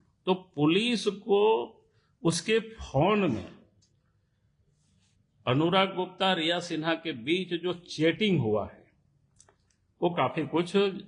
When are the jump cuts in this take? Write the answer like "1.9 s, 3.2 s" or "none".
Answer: none